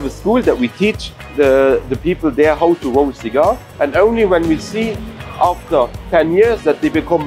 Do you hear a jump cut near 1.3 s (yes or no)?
no